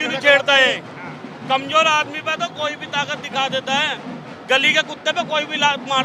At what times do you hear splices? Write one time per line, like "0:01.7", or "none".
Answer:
none

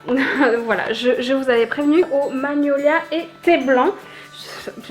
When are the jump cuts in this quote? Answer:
0:02.1

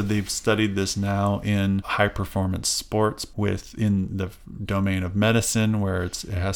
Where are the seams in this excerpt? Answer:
0:01.9
0:03.2

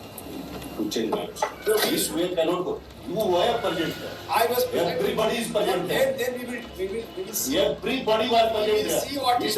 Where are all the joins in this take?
0:01.6

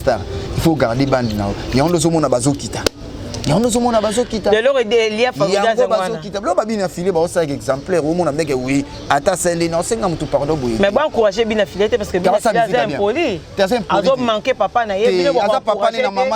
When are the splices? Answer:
none

